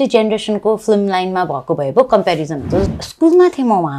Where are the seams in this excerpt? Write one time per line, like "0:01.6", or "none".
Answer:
0:02.9